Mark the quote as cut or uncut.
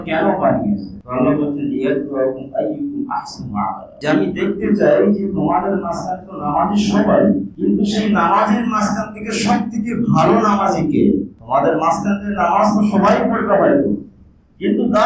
uncut